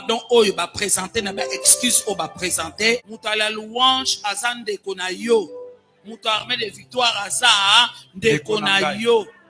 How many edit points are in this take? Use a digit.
1